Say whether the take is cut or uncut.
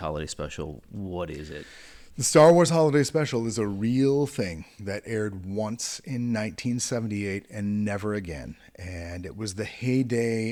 uncut